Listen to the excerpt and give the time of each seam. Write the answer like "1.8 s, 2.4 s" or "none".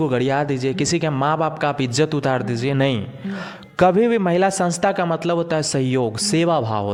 none